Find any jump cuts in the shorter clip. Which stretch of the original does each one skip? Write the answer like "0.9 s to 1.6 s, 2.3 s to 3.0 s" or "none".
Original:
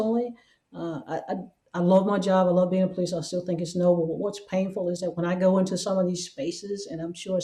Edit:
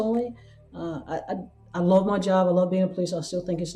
none